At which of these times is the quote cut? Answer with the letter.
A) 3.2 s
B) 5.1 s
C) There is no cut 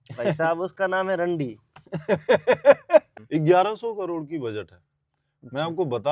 A